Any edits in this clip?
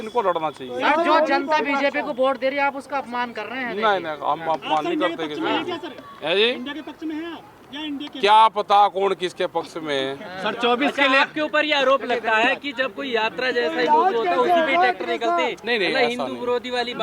no; 0 cuts

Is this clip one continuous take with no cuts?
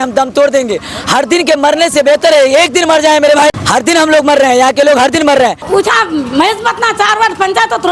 no; 2 cuts; at 3.6 s, 5.6 s

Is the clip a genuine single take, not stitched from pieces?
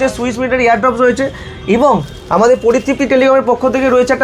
yes; 0 cuts

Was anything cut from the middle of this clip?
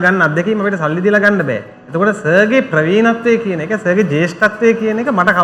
no; 0 cuts

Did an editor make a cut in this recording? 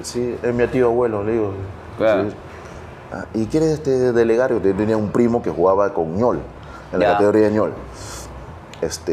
no; 0 cuts

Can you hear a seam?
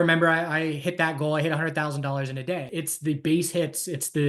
yes; 1 cut; at 2.7 s

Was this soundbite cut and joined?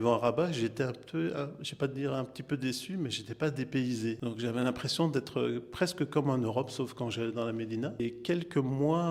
yes; 2 cuts; at 4.2 s, 8.0 s

